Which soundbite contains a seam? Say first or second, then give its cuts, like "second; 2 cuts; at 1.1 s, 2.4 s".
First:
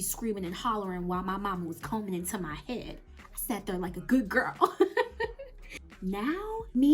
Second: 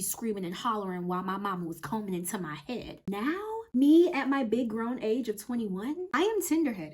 second; 2 cuts; at 3.0 s, 6.0 s